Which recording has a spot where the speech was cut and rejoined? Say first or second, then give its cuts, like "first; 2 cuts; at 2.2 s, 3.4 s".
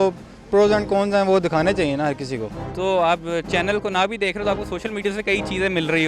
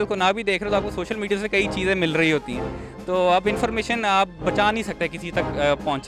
first; 1 cut; at 2.5 s